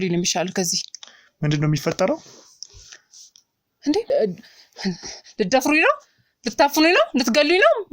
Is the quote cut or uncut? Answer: cut